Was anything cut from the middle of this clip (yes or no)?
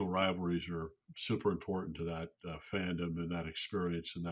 yes